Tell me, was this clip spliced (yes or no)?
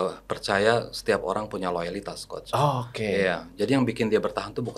no